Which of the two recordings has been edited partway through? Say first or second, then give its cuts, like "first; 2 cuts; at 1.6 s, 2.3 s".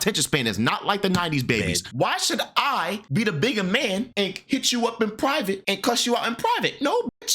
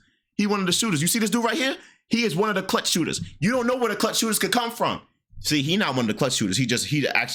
first; 4 cuts; at 1.9 s, 3.0 s, 4.1 s, 5.6 s